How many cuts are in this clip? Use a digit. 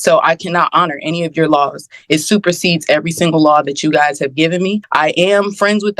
1